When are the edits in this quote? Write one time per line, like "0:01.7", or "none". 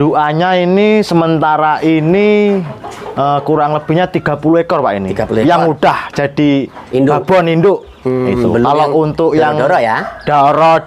none